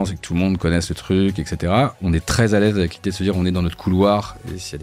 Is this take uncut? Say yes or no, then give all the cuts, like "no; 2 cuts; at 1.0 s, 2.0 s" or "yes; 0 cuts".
no; 1 cut; at 2.0 s